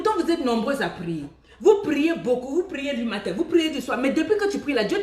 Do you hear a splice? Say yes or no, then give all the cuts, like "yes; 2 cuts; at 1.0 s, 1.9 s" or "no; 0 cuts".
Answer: no; 0 cuts